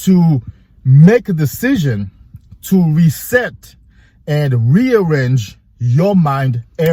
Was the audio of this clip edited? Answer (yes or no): no